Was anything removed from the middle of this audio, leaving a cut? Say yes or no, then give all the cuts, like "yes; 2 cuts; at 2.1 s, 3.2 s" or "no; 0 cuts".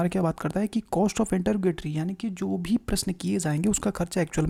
no; 0 cuts